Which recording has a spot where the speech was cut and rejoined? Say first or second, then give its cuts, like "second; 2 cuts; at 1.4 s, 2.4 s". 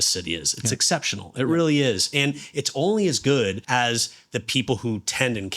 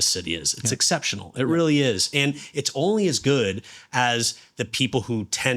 first; 1 cut; at 3.6 s